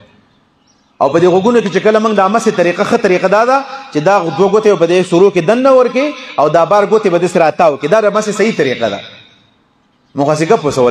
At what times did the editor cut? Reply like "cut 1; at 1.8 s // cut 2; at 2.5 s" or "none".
none

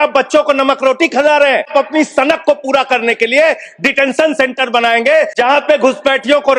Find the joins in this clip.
cut 1; at 1.7 s // cut 2; at 5.3 s

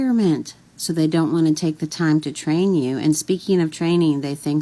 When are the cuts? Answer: none

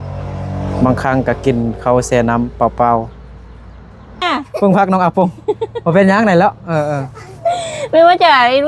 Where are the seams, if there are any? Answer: cut 1; at 4.2 s

